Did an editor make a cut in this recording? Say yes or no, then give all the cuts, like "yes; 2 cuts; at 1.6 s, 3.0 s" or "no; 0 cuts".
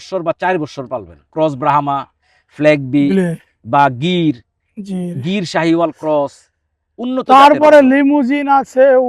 yes; 1 cut; at 1.3 s